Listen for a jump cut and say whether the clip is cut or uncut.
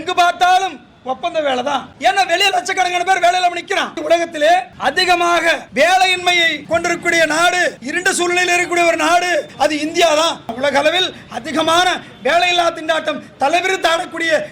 cut